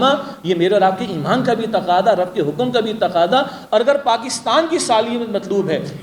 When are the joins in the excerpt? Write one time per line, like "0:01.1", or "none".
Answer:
none